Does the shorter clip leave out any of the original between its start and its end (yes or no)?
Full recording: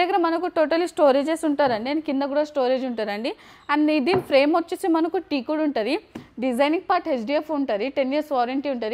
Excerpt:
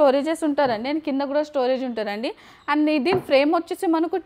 no